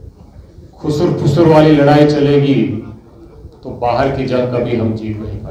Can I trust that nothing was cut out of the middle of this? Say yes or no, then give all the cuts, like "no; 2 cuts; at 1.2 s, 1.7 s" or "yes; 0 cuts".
yes; 0 cuts